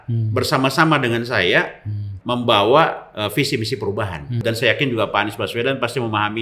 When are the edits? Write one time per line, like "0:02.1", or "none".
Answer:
0:02.1
0:04.4